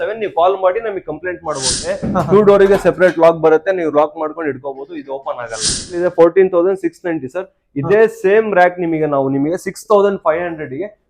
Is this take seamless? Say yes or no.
no